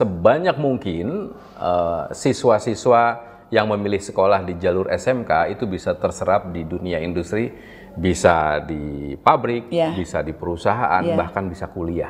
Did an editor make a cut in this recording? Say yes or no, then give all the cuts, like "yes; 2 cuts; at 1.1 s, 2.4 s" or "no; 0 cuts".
no; 0 cuts